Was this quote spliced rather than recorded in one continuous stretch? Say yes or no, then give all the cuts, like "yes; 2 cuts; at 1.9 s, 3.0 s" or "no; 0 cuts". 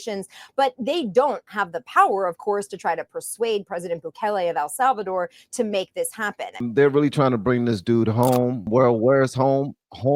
yes; 1 cut; at 6.6 s